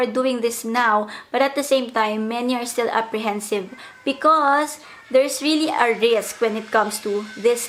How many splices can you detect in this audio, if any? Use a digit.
0